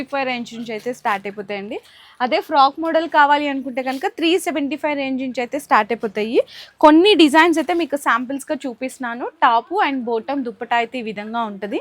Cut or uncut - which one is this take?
uncut